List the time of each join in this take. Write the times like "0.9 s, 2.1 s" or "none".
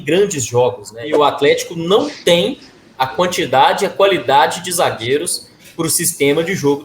1.1 s